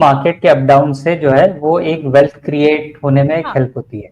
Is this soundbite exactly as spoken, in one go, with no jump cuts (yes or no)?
yes